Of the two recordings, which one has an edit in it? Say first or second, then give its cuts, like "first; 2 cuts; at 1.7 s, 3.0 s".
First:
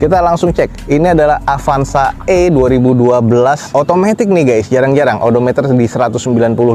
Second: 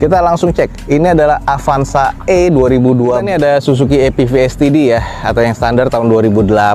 second; 1 cut; at 3.2 s